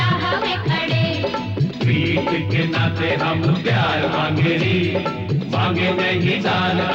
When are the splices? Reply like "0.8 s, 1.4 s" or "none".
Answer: none